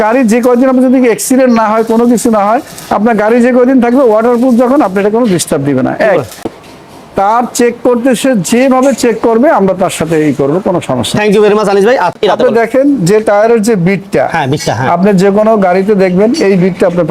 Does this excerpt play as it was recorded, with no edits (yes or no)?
no